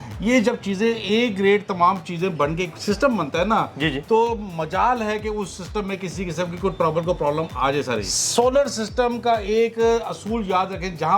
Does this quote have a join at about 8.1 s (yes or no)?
yes